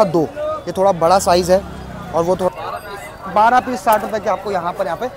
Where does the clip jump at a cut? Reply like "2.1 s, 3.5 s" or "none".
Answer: 2.5 s

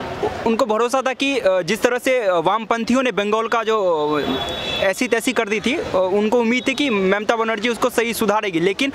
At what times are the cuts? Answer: none

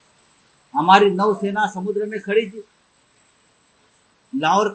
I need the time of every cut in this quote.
none

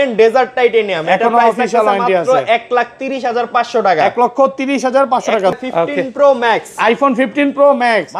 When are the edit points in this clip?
5.5 s

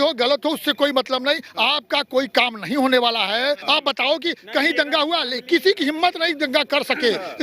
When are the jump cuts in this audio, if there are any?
3.6 s

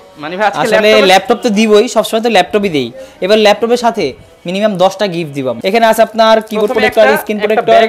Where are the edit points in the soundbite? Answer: 5.6 s

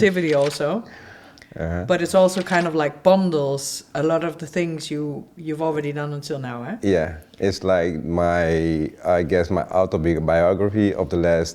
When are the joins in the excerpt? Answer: none

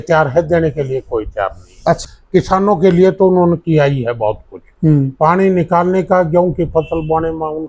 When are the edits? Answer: 2.0 s

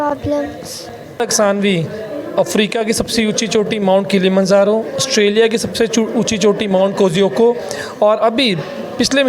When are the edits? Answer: 1.2 s

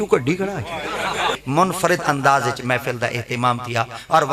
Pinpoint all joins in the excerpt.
1.4 s

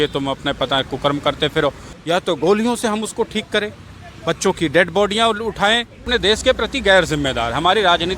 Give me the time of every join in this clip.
1.9 s, 6.0 s

